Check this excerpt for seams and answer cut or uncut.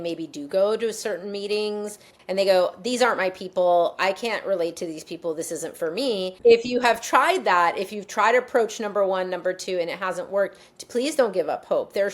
cut